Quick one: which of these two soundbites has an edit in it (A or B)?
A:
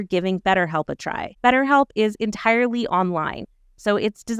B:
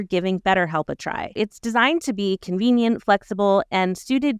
B